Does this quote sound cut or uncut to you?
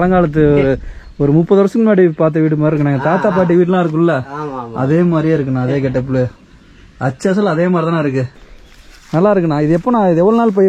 cut